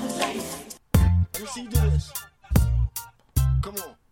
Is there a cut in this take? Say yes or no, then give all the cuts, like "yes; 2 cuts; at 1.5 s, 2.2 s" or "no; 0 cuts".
yes; 1 cut; at 1.0 s